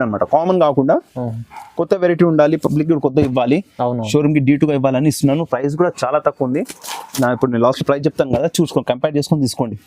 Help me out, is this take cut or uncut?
uncut